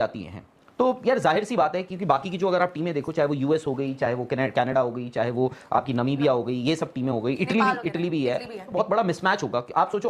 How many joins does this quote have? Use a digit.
1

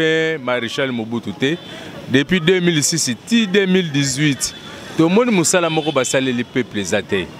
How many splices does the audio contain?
0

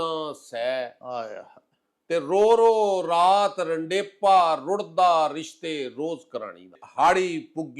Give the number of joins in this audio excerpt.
1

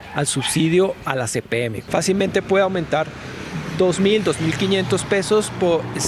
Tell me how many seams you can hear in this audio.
1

